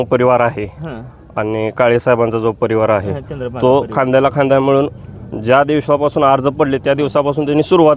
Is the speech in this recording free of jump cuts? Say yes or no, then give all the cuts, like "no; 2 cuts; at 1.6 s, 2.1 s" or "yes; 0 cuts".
yes; 0 cuts